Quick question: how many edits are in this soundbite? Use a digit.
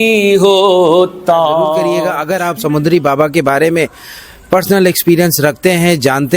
1